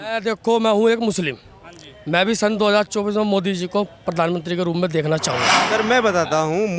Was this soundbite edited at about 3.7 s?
no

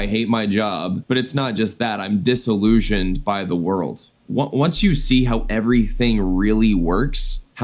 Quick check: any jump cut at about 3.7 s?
no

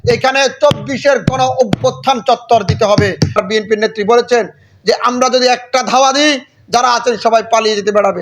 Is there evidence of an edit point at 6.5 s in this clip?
no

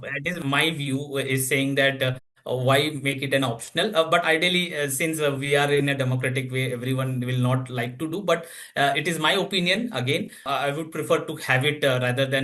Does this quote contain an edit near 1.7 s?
no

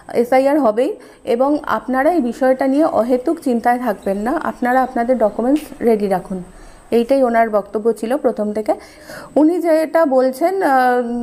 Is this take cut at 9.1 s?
yes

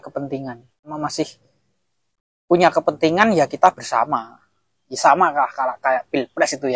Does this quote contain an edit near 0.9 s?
yes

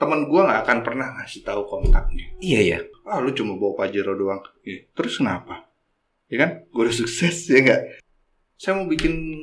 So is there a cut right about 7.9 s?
yes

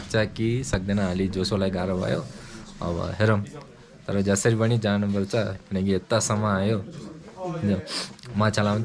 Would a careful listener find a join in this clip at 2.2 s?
no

